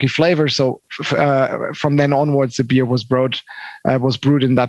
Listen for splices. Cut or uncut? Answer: uncut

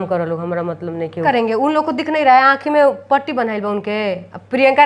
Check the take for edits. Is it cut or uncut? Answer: cut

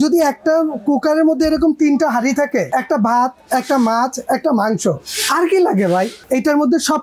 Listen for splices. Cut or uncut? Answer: cut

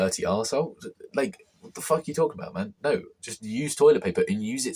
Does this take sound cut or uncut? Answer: uncut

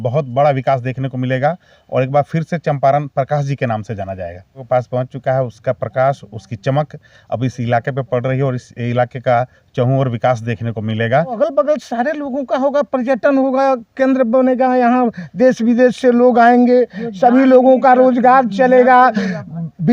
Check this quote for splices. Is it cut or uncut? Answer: cut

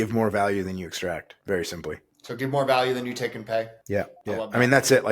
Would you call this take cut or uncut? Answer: cut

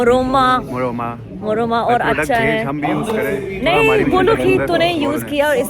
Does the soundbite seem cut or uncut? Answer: uncut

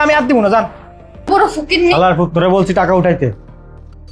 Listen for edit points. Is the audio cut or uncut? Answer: cut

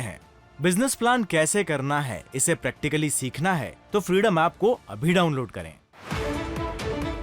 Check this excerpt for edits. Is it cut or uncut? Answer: cut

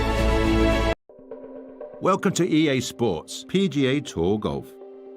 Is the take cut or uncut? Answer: cut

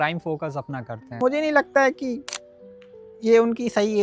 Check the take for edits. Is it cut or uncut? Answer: cut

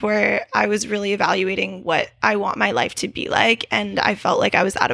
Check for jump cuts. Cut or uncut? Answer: uncut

